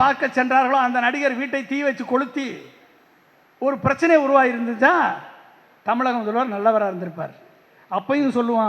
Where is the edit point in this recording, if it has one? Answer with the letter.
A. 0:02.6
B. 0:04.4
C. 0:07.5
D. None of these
D